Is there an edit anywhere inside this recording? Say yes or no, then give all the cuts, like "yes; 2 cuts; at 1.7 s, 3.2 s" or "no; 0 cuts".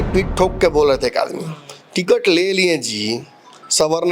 no; 0 cuts